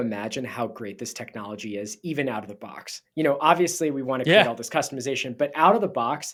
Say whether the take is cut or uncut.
uncut